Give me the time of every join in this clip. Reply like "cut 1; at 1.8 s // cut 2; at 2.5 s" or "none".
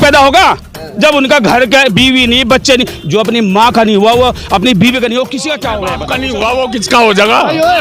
cut 1; at 6.0 s